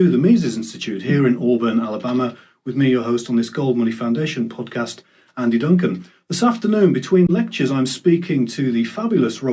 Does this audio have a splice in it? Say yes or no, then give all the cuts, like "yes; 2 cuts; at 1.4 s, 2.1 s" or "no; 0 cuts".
yes; 1 cut; at 5.7 s